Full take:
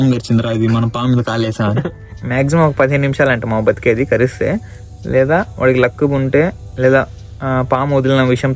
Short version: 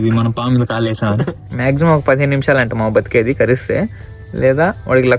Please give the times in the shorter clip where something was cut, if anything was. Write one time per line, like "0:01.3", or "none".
0:01.4